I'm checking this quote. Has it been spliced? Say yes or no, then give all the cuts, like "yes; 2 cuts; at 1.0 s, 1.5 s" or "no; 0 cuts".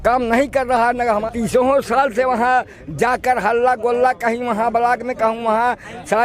yes; 1 cut; at 1.2 s